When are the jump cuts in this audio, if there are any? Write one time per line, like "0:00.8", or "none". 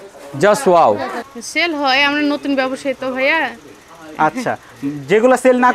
0:01.1